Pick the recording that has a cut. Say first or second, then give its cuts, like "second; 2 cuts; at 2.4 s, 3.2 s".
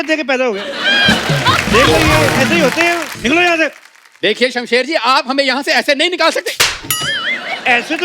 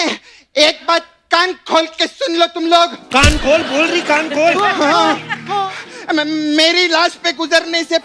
first; 1 cut; at 3.1 s